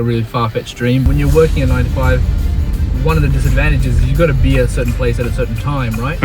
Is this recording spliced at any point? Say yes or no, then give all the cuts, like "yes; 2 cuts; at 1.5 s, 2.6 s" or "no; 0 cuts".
yes; 1 cut; at 1.1 s